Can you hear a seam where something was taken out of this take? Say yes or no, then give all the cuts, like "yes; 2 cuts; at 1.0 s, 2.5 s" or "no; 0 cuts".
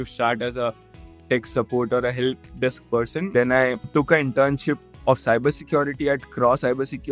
yes; 2 cuts; at 3.3 s, 3.8 s